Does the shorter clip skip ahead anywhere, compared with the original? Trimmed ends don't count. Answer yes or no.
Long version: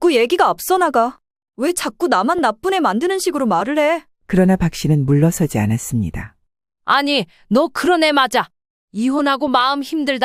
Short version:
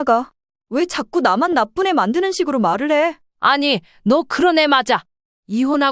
yes